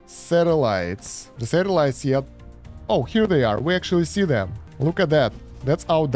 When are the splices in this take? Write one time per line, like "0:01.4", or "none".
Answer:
0:01.4